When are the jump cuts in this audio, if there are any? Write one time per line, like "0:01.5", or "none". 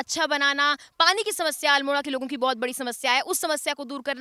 none